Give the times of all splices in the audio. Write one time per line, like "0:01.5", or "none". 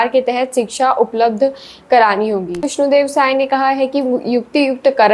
0:02.7